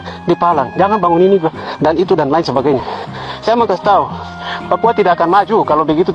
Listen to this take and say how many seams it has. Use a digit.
0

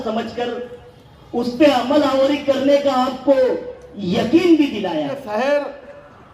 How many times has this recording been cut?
1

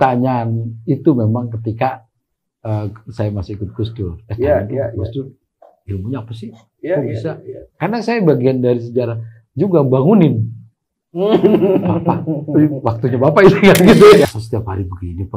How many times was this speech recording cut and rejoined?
1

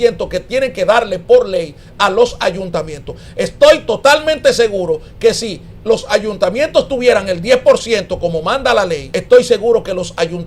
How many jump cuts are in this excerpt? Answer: 1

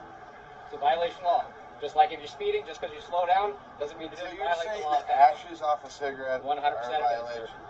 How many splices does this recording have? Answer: 1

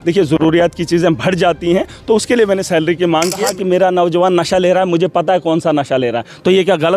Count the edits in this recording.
1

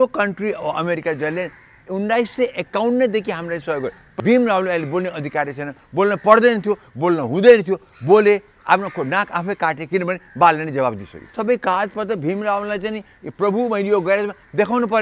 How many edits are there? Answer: 2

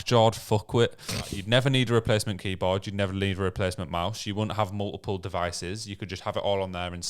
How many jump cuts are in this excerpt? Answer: 1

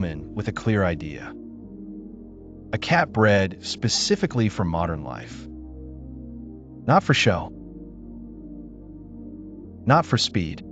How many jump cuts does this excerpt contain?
6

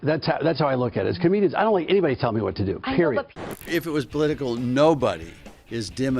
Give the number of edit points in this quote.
1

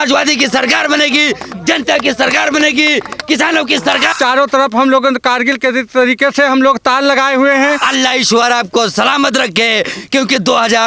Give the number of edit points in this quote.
2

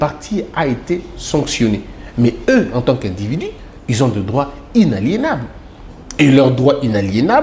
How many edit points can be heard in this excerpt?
0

